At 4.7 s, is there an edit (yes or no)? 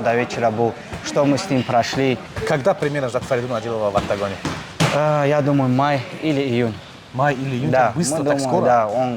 no